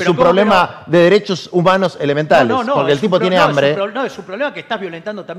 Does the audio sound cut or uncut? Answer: uncut